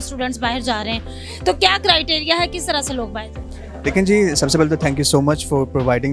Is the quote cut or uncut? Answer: uncut